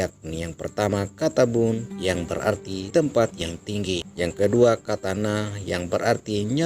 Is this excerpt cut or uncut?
cut